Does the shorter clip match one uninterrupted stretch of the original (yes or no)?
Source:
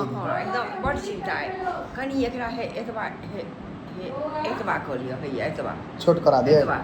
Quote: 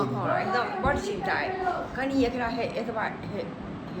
yes